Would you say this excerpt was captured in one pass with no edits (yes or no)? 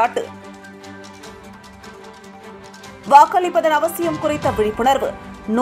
yes